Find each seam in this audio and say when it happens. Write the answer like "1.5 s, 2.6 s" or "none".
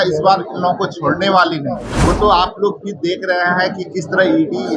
1.9 s